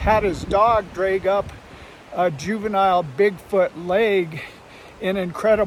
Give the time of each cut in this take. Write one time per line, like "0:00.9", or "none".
none

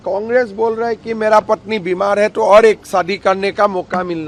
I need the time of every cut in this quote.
none

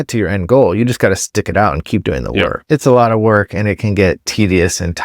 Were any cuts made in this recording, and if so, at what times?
0:02.6
0:04.3

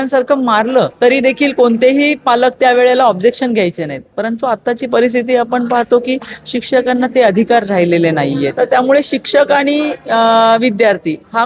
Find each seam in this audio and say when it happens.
0:00.9
0:08.5

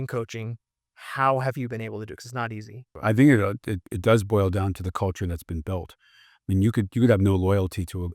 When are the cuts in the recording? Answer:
0:02.9

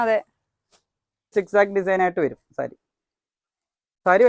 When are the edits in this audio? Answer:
0:01.3

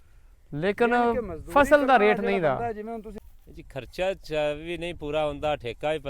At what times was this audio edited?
0:03.1

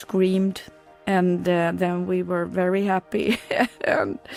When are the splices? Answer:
none

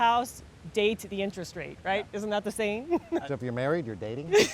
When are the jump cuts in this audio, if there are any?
0:03.2

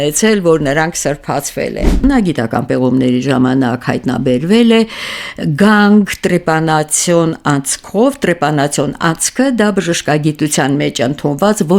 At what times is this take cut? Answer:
0:02.0

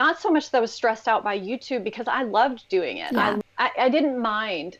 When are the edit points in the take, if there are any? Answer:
0:03.4

